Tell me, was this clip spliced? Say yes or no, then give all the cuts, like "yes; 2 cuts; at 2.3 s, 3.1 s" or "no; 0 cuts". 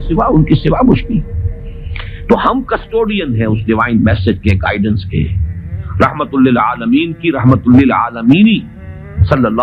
no; 0 cuts